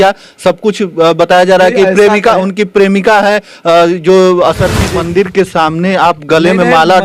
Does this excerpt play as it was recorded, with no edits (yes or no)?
no